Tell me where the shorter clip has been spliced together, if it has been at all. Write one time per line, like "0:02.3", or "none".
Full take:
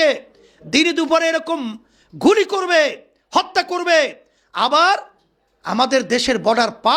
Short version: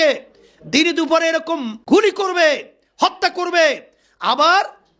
0:01.7